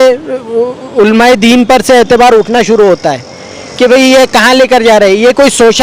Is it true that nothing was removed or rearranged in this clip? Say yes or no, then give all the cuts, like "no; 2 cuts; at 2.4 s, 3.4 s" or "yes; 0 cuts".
yes; 0 cuts